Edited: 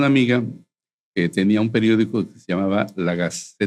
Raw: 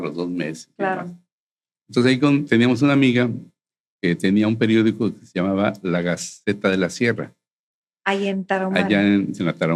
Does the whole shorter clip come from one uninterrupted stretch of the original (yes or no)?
yes